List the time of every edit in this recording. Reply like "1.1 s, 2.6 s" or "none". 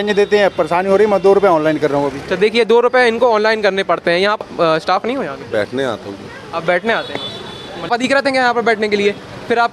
4.4 s, 7.9 s